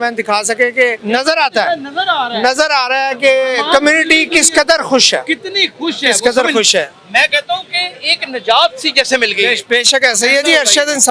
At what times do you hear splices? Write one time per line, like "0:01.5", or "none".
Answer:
0:01.0